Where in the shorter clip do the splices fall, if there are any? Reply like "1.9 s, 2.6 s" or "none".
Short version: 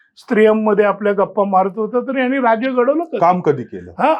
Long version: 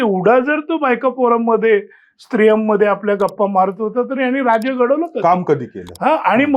none